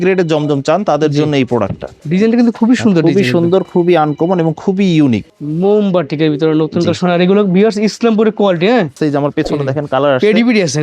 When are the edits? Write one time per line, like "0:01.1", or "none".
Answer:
0:01.9
0:05.3
0:08.9